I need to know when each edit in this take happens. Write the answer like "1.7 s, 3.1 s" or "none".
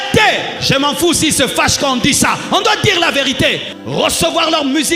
3.7 s